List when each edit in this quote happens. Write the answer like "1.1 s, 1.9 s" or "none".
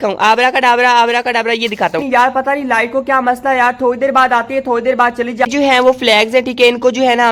2.0 s, 5.5 s